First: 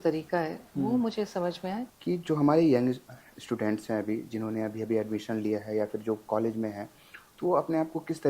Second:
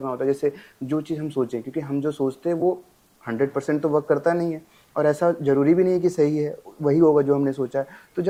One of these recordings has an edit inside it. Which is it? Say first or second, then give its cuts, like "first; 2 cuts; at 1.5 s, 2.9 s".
first; 1 cut; at 1.9 s